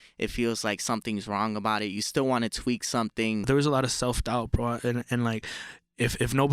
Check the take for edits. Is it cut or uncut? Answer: cut